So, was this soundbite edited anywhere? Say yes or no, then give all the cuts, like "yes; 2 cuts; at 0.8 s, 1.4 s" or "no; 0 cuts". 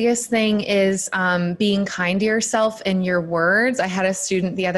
no; 0 cuts